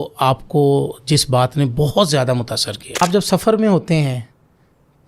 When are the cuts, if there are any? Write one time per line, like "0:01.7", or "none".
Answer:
0:03.0